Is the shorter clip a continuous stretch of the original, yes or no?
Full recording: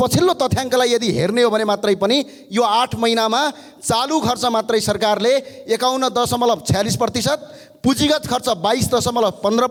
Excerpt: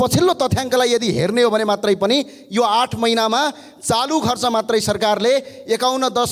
yes